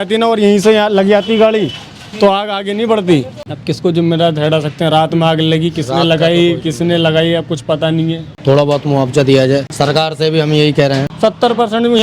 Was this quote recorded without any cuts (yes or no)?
no